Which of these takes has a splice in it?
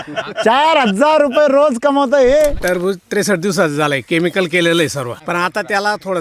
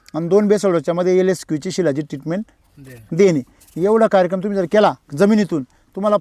first; 2 cuts; at 2.6 s, 5.1 s

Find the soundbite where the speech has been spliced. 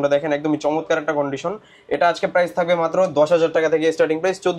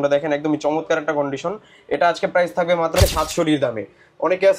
second; 1 cut; at 3.0 s

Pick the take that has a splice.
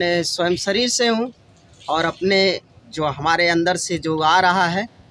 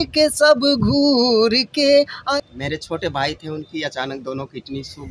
second; 1 cut; at 2.2 s

